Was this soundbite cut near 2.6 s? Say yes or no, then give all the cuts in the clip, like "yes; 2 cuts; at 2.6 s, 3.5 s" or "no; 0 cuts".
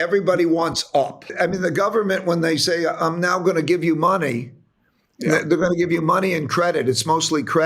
no; 1 cut; at 1.3 s